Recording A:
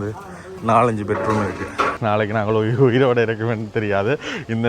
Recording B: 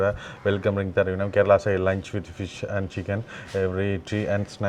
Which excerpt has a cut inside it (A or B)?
A